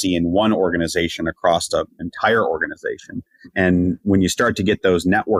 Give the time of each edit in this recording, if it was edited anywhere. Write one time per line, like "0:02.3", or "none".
none